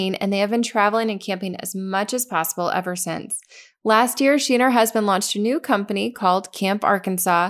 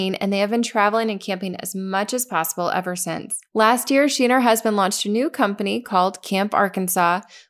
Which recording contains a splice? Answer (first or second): second